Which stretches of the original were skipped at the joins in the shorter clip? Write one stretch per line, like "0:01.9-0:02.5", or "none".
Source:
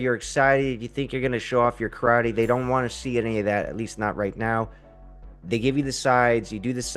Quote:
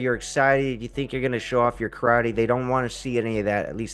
none